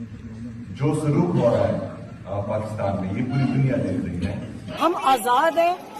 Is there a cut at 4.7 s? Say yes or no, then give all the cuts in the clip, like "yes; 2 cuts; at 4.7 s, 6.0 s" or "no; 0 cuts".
yes; 1 cut; at 4.7 s